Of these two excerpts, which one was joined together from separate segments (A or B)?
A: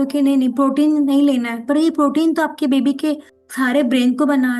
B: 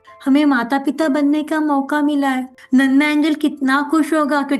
B